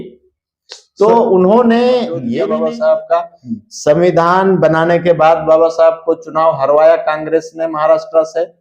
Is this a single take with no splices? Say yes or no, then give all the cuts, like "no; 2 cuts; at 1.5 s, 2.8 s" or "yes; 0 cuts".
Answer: no; 1 cut; at 2.2 s